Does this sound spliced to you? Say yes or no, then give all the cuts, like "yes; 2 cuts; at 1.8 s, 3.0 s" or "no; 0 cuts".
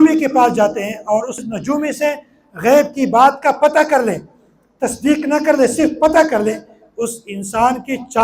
yes; 1 cut; at 1.4 s